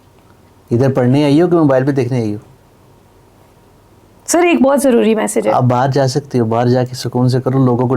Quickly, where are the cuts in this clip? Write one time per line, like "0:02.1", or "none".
none